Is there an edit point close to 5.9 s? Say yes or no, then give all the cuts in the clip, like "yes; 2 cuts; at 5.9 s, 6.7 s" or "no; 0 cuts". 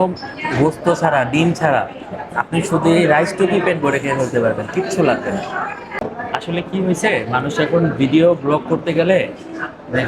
yes; 1 cut; at 5.9 s